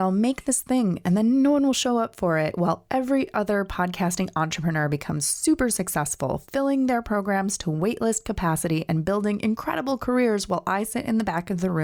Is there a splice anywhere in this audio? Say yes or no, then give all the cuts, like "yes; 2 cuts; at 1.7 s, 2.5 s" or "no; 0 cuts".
no; 0 cuts